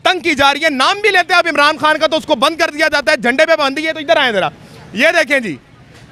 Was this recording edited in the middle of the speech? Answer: no; 0 cuts

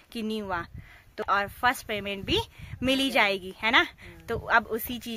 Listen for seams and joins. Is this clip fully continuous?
no; 1 cut; at 1.2 s

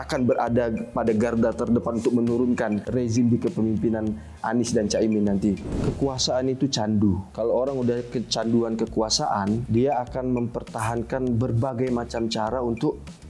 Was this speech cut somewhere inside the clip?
yes; 4 cuts; at 2.9 s, 5.7 s, 7.3 s, 9.6 s

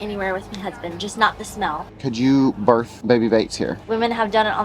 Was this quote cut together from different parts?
yes; 3 cuts; at 2.0 s, 2.9 s, 3.9 s

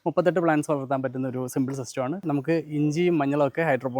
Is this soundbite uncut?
no; 1 cut; at 2.3 s

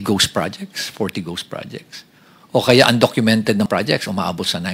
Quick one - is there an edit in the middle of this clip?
yes; 1 cut; at 3.7 s

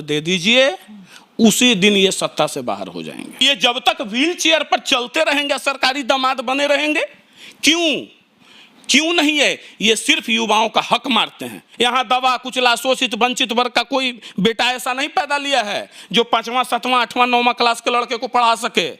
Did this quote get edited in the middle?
yes; 2 cuts; at 3.4 s, 11.6 s

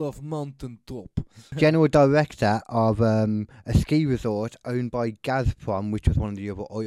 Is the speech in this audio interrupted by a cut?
yes; 1 cut; at 1.4 s

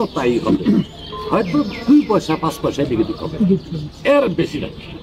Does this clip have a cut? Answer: no; 0 cuts

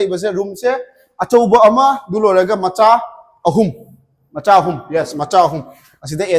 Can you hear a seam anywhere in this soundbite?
no; 0 cuts

